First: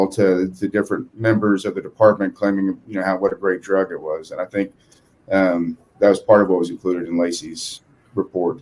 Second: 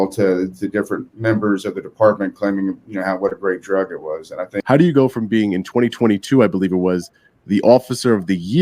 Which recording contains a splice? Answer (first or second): second